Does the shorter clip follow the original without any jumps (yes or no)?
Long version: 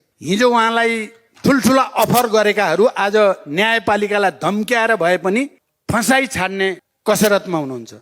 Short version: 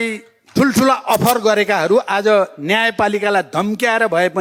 yes